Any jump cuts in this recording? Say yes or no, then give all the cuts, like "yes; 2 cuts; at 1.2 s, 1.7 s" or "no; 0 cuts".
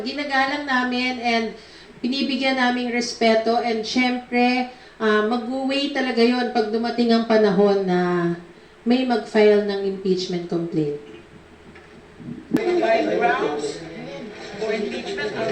yes; 1 cut; at 12.6 s